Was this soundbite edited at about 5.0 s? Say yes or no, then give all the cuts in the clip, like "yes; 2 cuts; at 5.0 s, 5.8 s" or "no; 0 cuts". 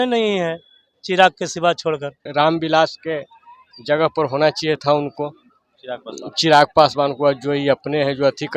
no; 1 cut; at 2.2 s